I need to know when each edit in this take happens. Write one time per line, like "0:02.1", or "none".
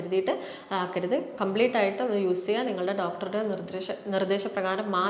none